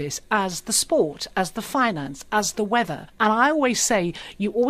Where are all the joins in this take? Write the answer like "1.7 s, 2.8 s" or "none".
3.0 s

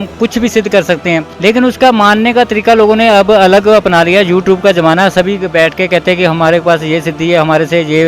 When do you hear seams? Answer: 1.3 s

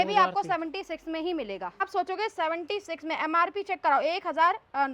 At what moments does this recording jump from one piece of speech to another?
1.8 s

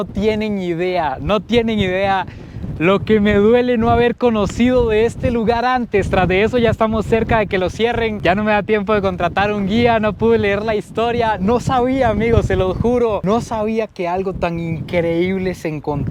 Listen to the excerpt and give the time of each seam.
none

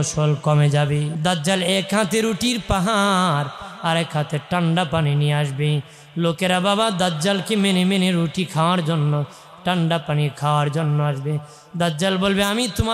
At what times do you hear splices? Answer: 1.1 s

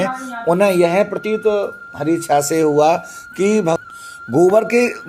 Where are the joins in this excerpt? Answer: 3.8 s

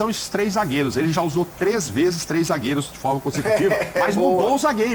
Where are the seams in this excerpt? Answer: none

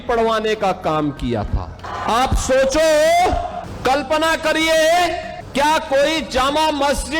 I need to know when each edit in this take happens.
1.8 s, 3.7 s, 5.3 s

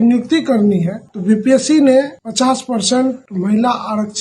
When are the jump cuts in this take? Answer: 1.1 s, 2.2 s, 3.3 s

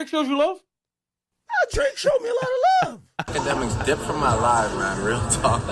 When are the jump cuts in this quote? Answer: 3.2 s

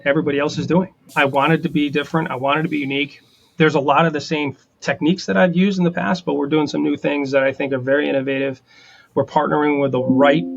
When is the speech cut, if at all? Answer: 1.1 s, 4.7 s

